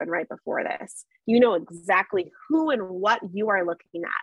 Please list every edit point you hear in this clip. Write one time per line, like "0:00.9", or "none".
none